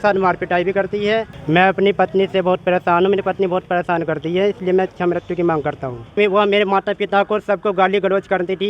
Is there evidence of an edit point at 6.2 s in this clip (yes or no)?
yes